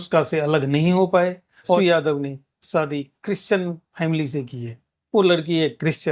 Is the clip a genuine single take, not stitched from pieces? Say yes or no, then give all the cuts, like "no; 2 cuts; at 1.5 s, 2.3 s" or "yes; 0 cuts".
no; 1 cut; at 1.8 s